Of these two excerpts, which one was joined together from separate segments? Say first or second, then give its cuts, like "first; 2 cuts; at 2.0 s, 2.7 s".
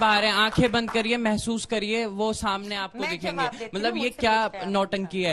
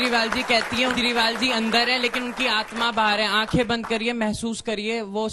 second; 1 cut; at 0.9 s